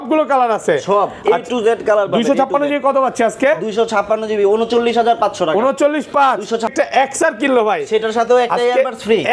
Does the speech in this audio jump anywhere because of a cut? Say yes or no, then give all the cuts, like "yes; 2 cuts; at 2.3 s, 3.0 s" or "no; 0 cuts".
yes; 1 cut; at 6.7 s